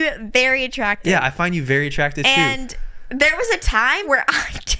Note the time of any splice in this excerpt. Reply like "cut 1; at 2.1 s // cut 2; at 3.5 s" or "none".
none